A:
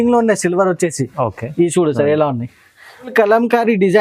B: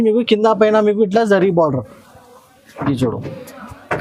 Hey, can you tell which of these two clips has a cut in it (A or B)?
A